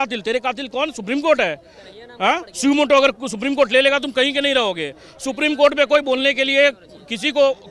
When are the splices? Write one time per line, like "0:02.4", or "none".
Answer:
none